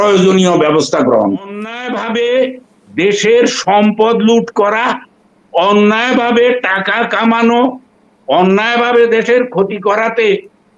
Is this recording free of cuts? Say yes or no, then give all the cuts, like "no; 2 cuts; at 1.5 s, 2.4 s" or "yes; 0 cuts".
no; 1 cut; at 1.8 s